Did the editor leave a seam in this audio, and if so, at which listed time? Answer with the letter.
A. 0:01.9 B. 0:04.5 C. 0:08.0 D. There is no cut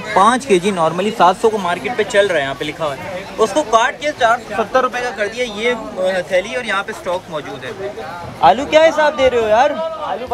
C